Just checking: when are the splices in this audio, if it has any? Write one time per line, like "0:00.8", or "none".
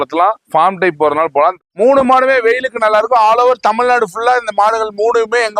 0:01.6